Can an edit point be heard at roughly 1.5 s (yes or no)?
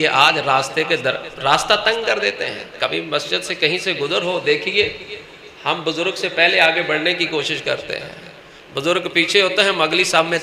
no